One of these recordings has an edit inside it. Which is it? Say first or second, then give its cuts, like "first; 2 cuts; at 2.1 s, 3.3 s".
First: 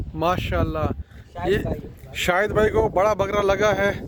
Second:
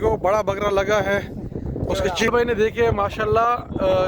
second; 1 cut; at 2.3 s